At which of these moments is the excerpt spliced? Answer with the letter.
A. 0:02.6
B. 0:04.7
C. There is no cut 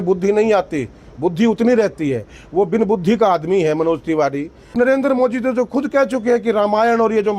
B